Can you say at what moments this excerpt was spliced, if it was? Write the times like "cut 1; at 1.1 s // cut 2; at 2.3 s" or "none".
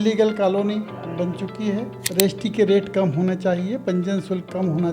cut 1; at 1.9 s